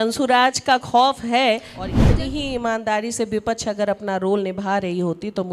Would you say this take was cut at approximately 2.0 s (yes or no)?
yes